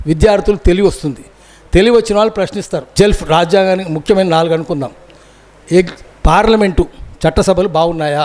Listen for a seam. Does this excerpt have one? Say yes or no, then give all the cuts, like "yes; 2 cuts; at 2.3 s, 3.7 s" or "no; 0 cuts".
yes; 1 cut; at 2.8 s